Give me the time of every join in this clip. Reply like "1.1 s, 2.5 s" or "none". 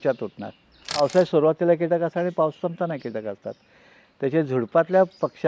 1.0 s